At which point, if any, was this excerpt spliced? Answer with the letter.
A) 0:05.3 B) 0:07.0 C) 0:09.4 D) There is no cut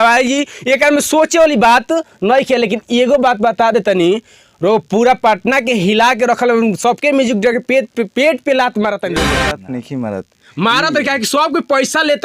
C